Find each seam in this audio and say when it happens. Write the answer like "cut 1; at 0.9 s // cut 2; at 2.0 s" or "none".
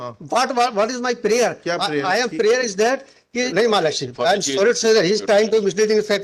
cut 1; at 3.5 s